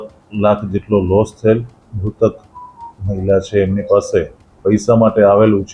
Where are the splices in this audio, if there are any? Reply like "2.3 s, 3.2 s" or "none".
1.8 s, 4.4 s